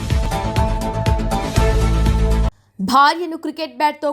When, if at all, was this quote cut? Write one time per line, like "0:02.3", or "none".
0:02.6